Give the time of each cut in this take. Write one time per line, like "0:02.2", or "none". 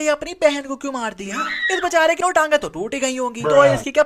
0:02.2